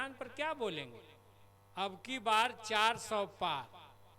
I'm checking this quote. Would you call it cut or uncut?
cut